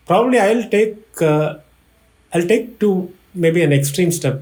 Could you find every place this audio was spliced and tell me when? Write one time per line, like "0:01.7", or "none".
none